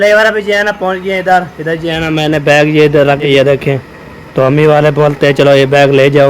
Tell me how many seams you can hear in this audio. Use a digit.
1